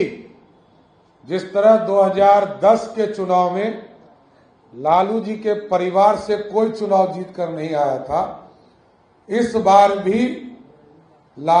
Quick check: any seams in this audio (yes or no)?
no